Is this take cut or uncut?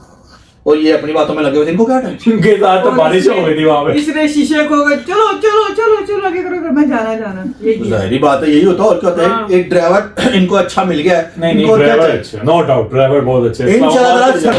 uncut